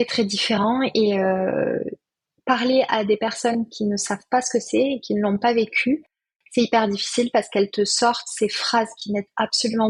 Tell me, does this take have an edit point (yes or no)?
no